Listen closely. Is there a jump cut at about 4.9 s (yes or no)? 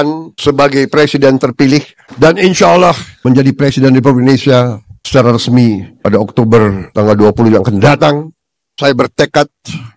no